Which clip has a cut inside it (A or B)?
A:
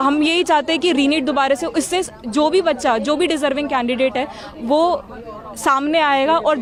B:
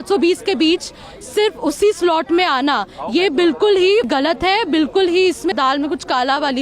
B